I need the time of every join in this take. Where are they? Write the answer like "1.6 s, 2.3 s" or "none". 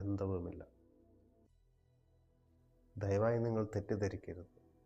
1.0 s, 2.9 s